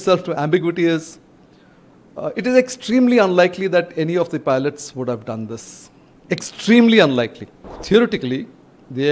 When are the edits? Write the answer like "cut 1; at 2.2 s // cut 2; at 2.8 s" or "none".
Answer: cut 1; at 7.8 s

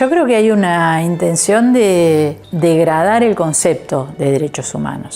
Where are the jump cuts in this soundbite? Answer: cut 1; at 2.4 s

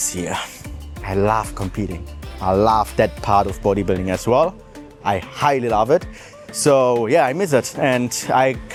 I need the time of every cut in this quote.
none

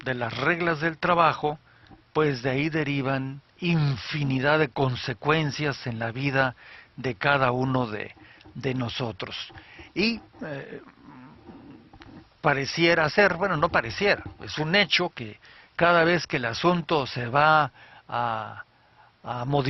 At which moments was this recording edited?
cut 1; at 8.9 s

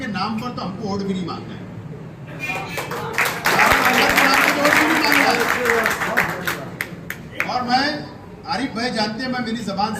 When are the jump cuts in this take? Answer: none

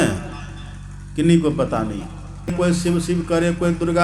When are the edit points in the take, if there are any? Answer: cut 1; at 2.5 s

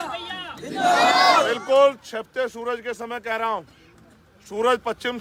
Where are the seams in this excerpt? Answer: none

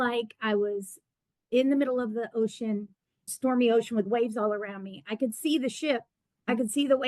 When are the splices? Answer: cut 1; at 3.3 s

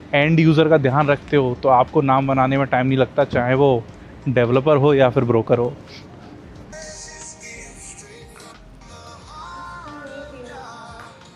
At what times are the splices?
none

